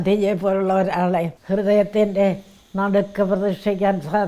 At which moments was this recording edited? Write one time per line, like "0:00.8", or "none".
0:01.4